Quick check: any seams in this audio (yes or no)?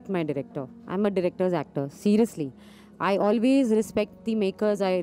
no